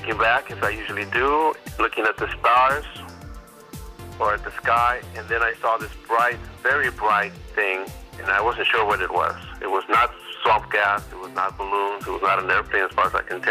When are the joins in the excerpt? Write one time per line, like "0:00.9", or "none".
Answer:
0:07.4